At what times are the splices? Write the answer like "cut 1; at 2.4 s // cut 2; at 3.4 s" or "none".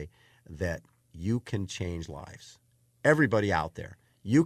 none